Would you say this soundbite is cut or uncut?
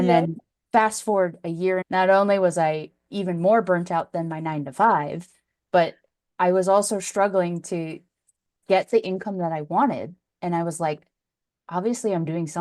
cut